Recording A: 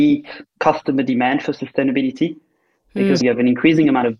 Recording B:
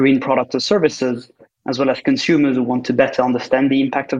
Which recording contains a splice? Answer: A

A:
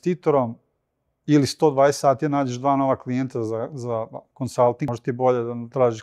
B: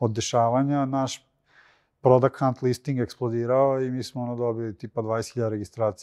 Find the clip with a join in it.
A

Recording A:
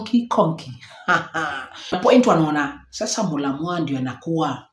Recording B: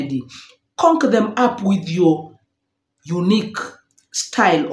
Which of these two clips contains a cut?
A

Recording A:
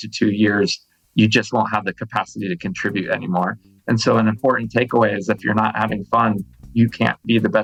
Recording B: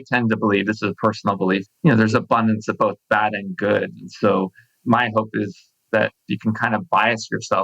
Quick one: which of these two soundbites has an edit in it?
B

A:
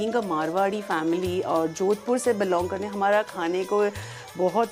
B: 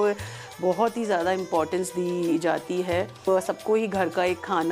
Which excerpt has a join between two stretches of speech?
B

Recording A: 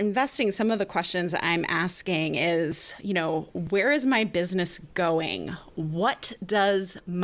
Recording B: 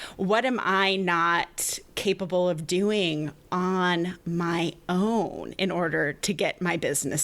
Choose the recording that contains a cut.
B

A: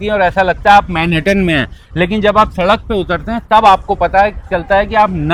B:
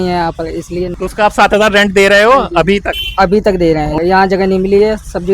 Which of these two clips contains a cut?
B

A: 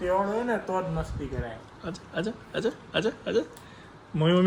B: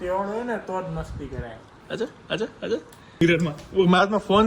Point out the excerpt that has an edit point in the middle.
B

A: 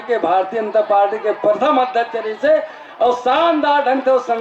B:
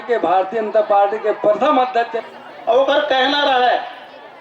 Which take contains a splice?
B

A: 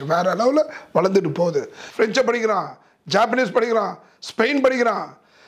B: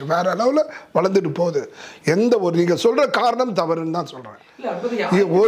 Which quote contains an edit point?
A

